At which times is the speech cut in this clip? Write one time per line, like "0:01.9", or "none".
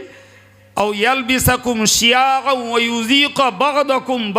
none